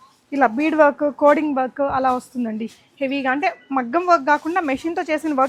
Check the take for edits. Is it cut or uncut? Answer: uncut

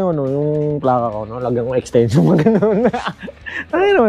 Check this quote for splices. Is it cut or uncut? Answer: uncut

